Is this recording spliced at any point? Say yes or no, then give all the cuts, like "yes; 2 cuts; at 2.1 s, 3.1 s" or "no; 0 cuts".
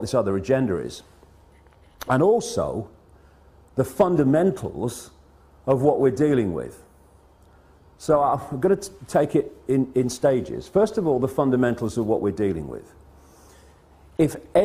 yes; 1 cut; at 9.7 s